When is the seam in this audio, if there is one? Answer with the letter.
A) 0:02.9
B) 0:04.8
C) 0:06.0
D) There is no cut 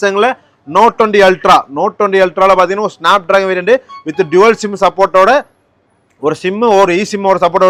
D